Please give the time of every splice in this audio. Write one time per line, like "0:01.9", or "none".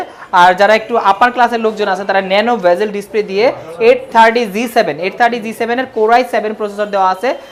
none